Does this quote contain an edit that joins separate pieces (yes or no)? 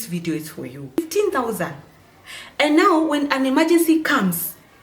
yes